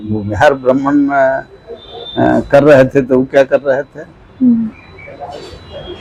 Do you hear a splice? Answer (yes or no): no